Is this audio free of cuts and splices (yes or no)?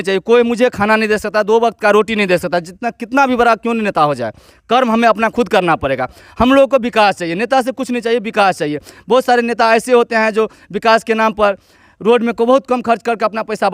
yes